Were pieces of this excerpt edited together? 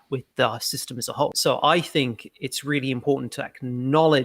yes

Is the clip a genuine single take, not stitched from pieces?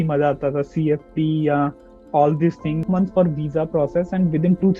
no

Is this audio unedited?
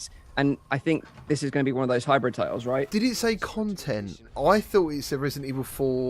no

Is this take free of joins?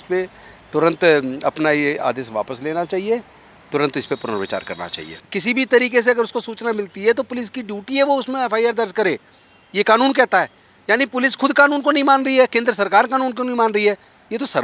no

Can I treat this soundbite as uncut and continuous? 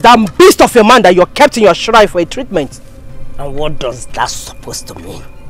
yes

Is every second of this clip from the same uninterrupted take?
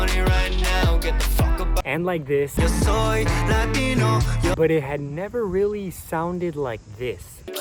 yes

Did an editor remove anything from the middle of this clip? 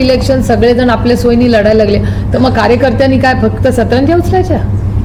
no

